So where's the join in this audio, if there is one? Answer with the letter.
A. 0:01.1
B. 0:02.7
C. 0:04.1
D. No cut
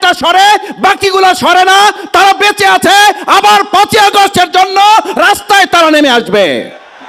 D